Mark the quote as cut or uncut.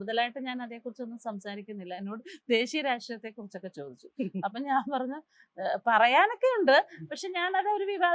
uncut